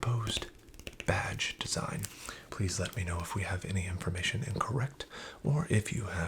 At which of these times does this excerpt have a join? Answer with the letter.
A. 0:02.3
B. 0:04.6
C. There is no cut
A